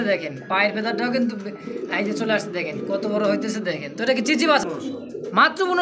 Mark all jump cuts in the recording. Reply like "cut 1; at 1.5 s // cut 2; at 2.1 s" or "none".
cut 1; at 4.6 s